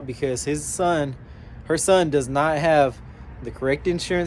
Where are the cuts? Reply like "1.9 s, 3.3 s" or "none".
none